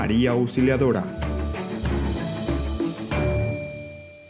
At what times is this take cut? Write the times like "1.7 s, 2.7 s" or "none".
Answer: 1.1 s